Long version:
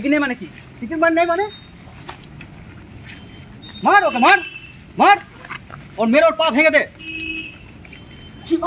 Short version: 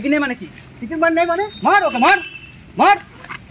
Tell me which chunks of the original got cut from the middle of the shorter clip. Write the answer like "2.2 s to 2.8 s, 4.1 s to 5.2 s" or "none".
1.5 s to 3.7 s